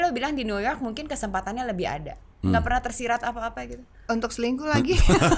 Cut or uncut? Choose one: uncut